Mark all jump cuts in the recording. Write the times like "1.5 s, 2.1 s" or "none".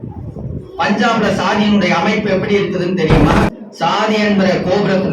3.5 s